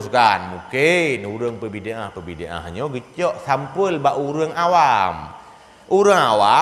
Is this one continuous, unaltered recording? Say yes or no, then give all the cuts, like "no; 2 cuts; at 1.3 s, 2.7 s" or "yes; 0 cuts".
yes; 0 cuts